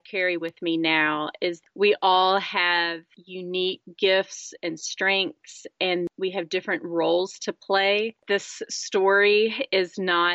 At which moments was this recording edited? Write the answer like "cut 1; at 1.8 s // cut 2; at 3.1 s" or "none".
cut 1; at 1.6 s // cut 2; at 6.1 s // cut 3; at 8.2 s